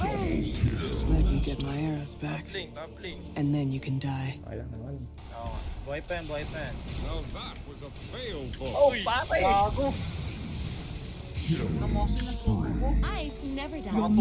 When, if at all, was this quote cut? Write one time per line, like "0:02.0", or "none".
0:05.2